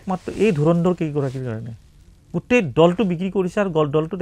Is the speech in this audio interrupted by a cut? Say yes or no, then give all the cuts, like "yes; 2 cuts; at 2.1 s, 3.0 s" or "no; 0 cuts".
no; 0 cuts